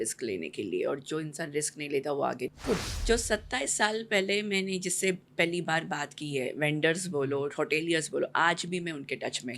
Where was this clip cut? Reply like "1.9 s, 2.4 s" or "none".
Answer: 2.5 s